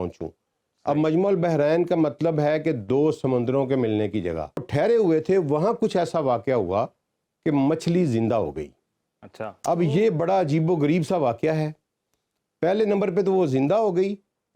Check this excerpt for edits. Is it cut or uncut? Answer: cut